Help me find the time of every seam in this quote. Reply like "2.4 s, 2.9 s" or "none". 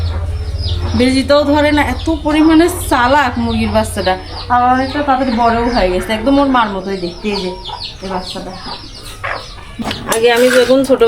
9.8 s